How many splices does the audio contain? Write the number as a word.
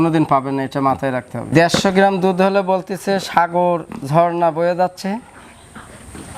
zero